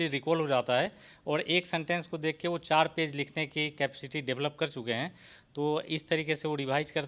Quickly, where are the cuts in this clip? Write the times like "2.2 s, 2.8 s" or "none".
none